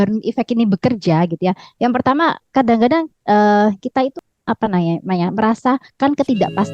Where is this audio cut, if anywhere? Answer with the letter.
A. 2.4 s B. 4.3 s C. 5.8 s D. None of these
B